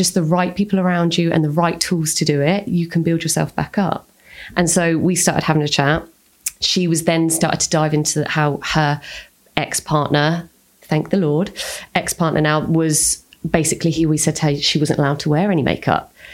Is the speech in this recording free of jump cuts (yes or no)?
yes